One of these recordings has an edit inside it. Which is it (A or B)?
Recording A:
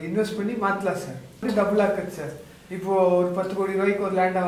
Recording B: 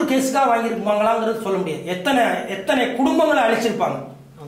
A